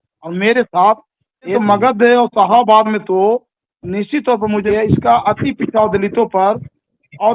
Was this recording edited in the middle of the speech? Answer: yes; 2 cuts; at 1.5 s, 4.6 s

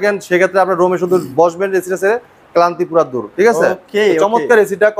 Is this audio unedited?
yes; 0 cuts

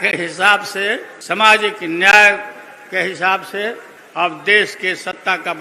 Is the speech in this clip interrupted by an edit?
yes; 2 cuts; at 1.1 s, 3.9 s

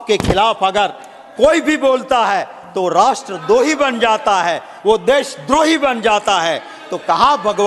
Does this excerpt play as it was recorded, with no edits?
yes; 0 cuts

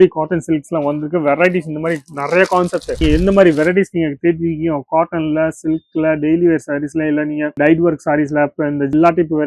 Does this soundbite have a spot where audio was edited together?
yes; 1 cut; at 3.0 s

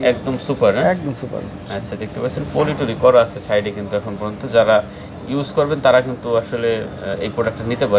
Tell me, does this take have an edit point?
no; 0 cuts

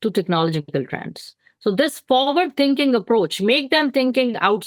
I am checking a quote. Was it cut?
no; 0 cuts

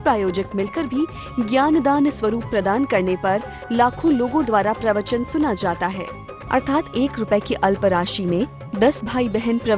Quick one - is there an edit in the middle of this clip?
no; 0 cuts

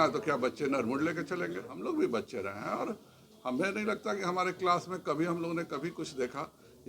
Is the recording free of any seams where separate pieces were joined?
no; 1 cut; at 1.7 s

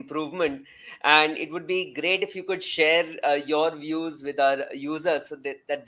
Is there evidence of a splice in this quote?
no; 0 cuts

